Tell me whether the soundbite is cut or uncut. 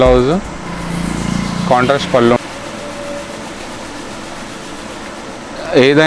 cut